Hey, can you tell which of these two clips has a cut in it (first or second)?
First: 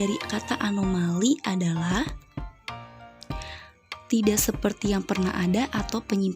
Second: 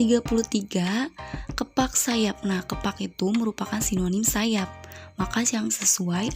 first